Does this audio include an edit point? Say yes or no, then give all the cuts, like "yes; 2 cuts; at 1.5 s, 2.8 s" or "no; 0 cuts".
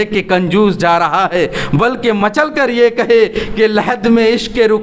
no; 0 cuts